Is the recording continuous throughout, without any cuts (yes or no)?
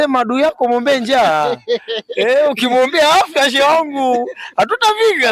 yes